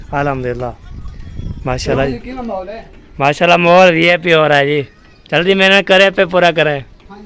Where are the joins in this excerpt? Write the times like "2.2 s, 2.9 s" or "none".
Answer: none